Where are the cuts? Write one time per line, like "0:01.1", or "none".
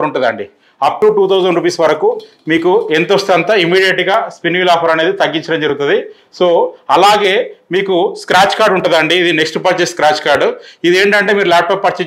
none